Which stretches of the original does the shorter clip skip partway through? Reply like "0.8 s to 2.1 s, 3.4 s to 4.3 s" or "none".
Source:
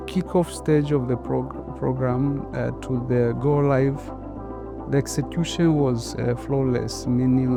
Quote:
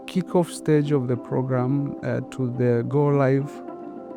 1.2 s to 1.7 s